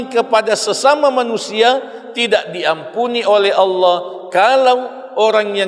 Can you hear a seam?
no; 0 cuts

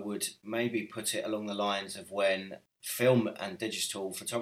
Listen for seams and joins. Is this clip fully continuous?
yes; 0 cuts

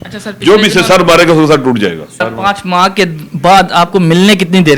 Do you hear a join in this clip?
yes; 1 cut; at 2.2 s

